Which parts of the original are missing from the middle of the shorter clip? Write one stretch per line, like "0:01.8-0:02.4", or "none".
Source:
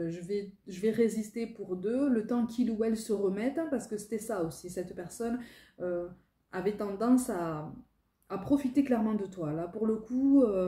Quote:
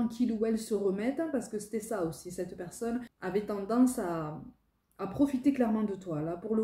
0:05.5-0:06.4